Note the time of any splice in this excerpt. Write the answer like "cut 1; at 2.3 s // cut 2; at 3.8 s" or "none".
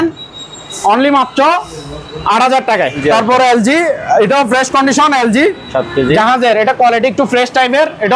cut 1; at 3.0 s